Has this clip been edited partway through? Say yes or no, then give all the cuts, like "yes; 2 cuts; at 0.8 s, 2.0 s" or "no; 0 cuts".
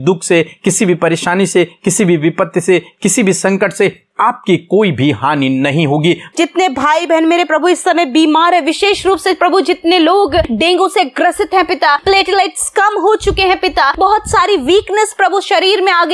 yes; 4 cuts; at 6.3 s, 10.5 s, 12.0 s, 13.9 s